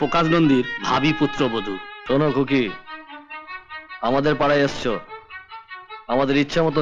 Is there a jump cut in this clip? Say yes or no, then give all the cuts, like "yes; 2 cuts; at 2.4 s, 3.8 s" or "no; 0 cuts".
yes; 1 cut; at 1.9 s